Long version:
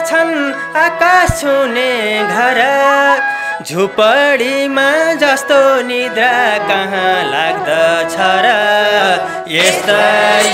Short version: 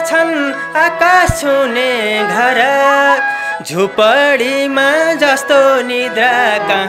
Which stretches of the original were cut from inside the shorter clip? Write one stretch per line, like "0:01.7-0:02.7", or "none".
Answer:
none

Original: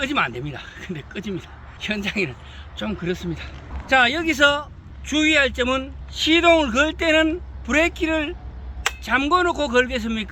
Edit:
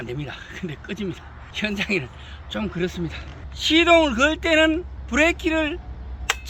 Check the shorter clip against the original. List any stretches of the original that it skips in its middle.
0:03.7-0:06.0

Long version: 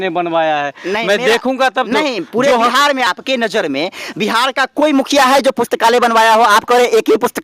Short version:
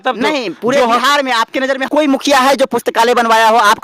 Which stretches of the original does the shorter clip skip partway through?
0:03.4-0:04.5

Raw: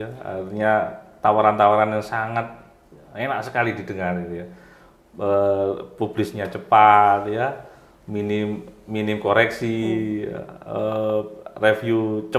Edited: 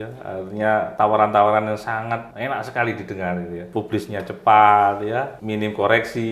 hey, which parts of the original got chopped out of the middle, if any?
0:00.9-0:01.2
0:02.5-0:03.1
0:04.4-0:05.9
0:07.6-0:08.8

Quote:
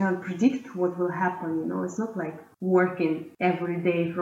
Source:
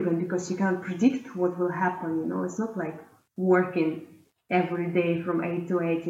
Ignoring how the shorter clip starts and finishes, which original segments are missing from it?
0:03.0-0:03.2
0:04.0-0:04.4

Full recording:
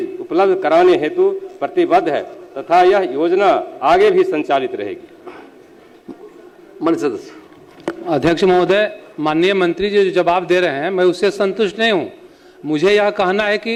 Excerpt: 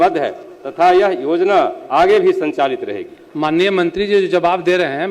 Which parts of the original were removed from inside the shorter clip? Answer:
0:05.1-0:09.1

